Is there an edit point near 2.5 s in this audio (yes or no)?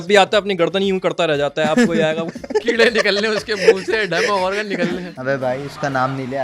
no